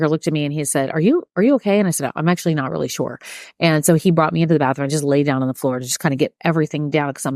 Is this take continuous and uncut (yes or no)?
yes